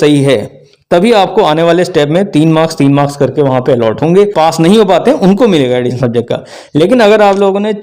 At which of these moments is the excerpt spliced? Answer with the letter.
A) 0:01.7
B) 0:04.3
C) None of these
B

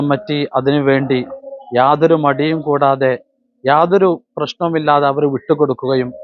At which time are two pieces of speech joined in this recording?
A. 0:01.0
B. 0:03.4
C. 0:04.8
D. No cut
D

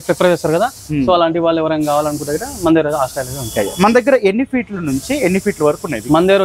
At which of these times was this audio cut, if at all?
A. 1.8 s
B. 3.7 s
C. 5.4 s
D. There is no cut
D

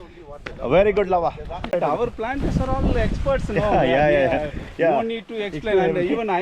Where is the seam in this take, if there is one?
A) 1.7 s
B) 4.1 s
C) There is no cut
A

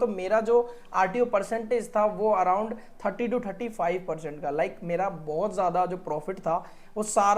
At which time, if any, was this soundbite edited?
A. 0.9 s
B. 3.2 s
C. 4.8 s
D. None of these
D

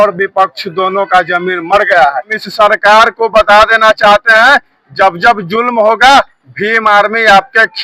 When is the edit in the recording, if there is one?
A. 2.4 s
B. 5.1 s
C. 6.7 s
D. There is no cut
A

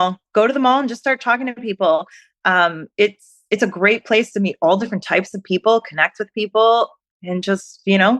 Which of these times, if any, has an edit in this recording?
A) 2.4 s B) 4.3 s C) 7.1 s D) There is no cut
C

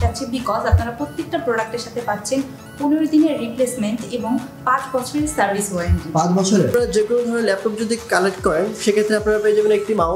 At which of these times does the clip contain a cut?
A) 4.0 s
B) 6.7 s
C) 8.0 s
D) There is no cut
B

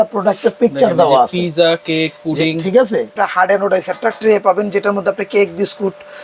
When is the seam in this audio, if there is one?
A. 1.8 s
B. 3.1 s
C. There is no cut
B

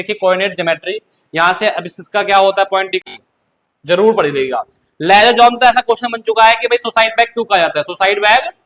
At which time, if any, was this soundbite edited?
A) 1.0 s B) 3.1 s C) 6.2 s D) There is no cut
B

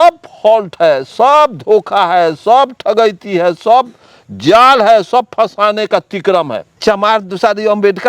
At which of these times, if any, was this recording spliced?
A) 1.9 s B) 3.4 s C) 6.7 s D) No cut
C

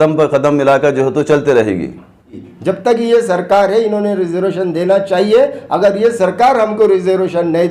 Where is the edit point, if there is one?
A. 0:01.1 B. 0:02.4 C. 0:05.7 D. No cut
B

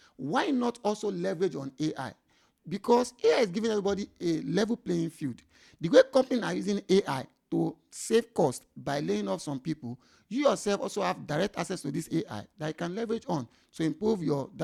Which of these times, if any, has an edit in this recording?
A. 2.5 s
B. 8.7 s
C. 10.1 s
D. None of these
D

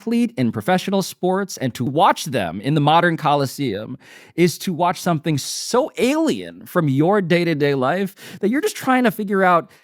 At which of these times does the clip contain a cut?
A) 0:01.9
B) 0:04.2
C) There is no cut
A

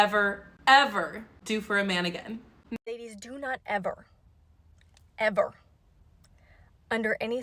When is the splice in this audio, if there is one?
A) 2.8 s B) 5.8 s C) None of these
A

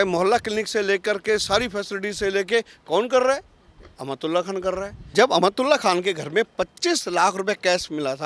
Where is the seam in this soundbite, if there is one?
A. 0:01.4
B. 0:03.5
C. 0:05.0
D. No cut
C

